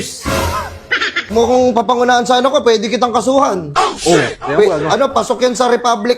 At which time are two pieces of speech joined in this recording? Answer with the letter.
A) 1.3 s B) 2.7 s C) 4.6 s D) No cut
A